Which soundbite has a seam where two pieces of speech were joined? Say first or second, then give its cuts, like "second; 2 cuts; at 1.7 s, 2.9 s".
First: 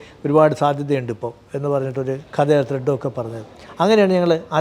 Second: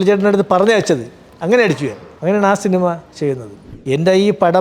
second; 2 cuts; at 2.1 s, 3.7 s